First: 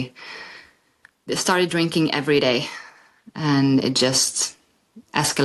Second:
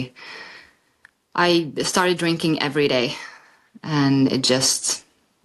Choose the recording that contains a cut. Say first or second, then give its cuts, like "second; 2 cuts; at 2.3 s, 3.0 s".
first; 1 cut; at 1.2 s